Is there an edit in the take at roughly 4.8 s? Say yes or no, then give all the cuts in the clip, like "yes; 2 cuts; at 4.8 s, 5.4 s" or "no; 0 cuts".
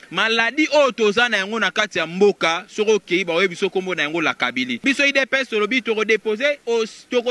yes; 1 cut; at 4.8 s